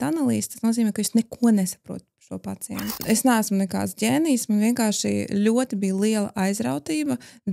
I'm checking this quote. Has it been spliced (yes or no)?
yes